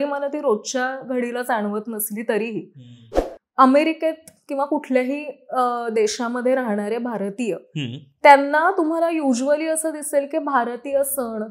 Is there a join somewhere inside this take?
yes; 1 cut; at 3.1 s

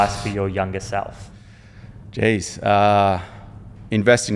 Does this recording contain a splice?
no; 0 cuts

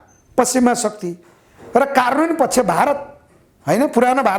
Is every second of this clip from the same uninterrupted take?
yes; 0 cuts

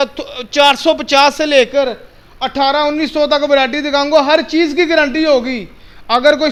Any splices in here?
no; 0 cuts

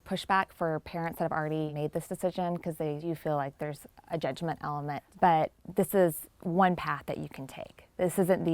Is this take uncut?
no; 4 cuts; at 1.7 s, 3.0 s, 5.1 s, 5.6 s

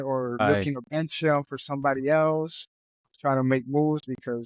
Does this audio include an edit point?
no; 0 cuts

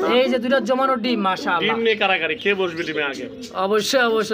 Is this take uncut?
yes; 0 cuts

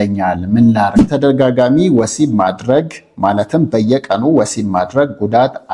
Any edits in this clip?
yes; 1 cut; at 1.0 s

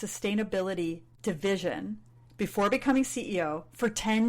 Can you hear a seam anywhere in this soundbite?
yes; 1 cut; at 1.1 s

